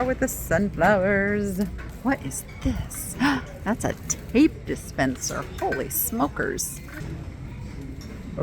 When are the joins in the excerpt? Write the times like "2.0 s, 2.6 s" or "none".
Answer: 2.0 s, 7.0 s